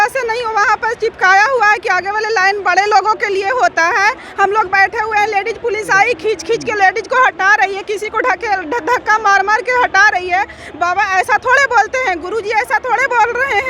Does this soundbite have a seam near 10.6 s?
no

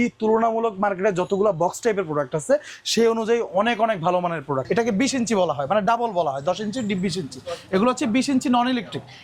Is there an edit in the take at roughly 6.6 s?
no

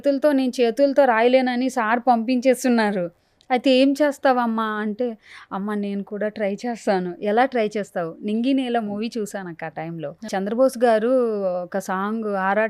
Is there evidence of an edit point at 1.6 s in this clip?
no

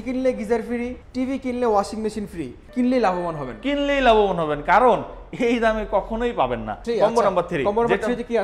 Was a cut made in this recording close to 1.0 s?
yes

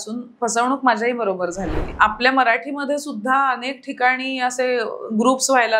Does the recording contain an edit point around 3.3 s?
no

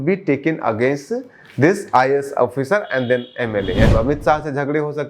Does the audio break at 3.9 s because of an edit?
yes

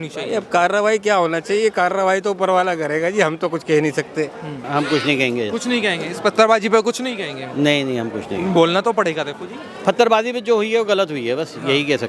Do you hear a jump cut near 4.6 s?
yes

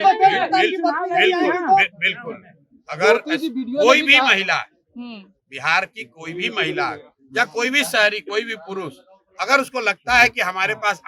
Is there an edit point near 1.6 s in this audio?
no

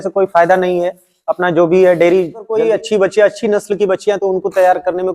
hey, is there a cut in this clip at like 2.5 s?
yes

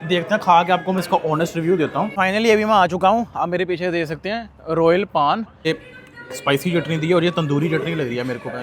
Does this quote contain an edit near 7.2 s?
no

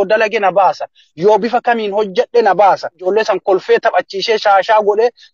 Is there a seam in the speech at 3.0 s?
yes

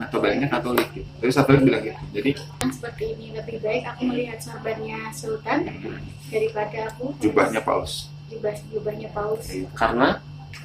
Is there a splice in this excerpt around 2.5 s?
yes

